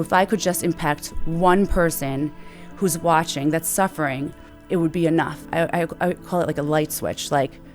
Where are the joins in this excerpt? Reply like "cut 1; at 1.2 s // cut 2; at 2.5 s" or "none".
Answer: cut 1; at 4.5 s // cut 2; at 5.4 s